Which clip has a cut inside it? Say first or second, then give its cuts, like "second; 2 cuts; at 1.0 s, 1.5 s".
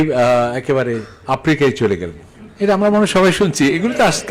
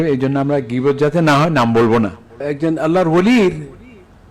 second; 1 cut; at 2.5 s